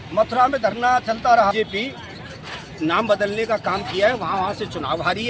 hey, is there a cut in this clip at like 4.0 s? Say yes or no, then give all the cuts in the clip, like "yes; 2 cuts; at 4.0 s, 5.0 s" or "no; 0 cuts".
no; 1 cut; at 1.5 s